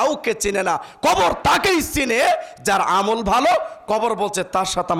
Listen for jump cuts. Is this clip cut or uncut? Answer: uncut